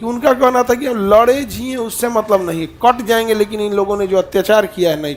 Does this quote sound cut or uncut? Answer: uncut